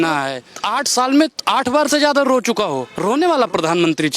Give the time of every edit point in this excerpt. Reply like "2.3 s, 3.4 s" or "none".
2.9 s